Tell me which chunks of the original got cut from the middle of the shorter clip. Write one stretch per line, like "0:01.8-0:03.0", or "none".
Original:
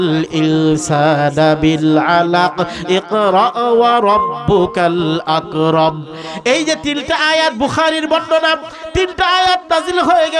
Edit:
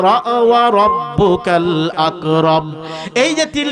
none